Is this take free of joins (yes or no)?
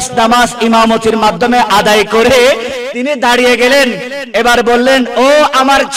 yes